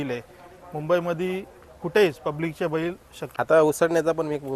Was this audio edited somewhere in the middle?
yes; 1 cut; at 3.2 s

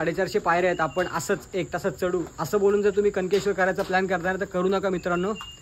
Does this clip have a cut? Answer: no; 0 cuts

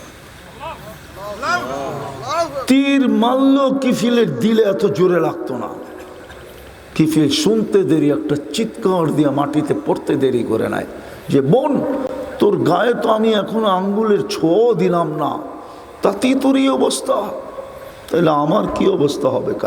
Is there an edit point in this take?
no; 0 cuts

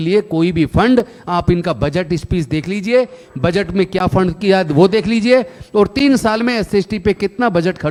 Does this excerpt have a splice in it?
no; 0 cuts

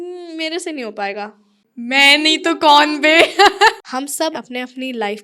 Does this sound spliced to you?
yes; 2 cuts; at 1.6 s, 4.0 s

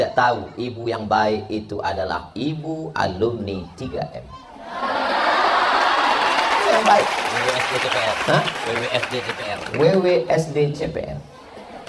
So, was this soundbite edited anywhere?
no; 0 cuts

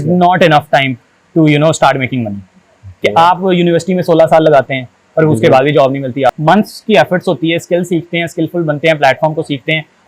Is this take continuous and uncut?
no; 1 cut; at 6.4 s

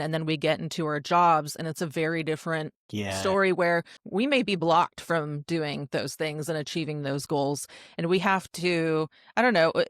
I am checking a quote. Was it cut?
yes; 2 cuts; at 2.8 s, 4.0 s

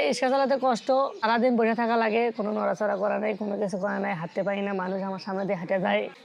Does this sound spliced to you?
no; 0 cuts

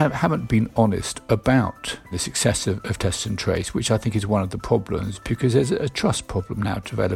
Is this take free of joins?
no; 1 cut; at 2.3 s

